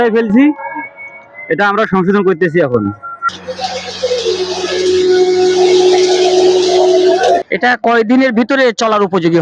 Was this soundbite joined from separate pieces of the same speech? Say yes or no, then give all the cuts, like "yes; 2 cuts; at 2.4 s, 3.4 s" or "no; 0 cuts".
yes; 2 cuts; at 3.1 s, 7.5 s